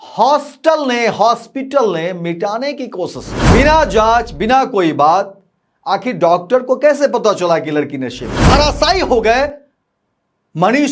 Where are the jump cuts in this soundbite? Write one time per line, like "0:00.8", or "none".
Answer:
0:03.3
0:08.3